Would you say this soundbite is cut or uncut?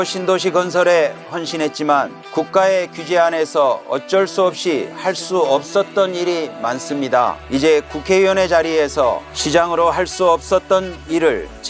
cut